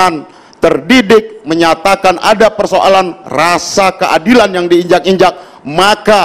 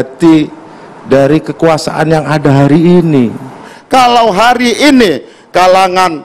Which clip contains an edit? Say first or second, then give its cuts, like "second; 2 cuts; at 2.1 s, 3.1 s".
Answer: second; 1 cut; at 3.7 s